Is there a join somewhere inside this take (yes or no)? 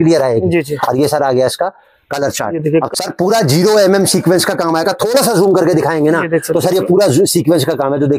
yes